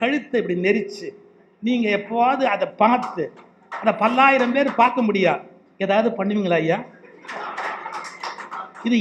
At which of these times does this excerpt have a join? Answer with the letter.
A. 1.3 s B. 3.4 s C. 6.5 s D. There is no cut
D